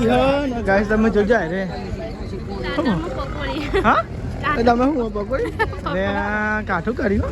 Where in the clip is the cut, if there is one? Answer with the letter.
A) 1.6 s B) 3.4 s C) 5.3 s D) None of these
D